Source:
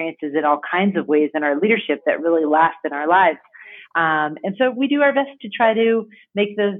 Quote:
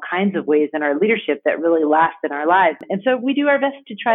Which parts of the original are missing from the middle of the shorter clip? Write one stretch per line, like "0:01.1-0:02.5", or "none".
0:03.5-0:04.4